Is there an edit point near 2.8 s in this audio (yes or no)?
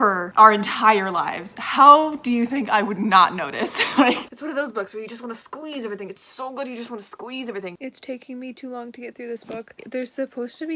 no